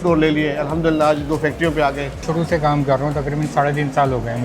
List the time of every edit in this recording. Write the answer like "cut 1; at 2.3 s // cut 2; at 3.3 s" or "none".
cut 1; at 2.2 s